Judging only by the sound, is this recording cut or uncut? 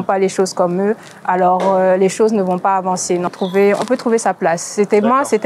cut